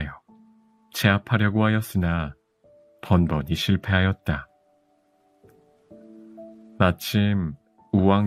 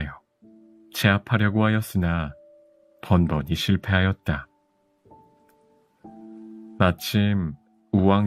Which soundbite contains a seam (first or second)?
second